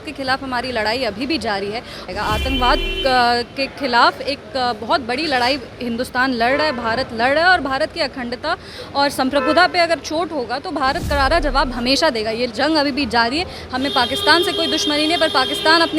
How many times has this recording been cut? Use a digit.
1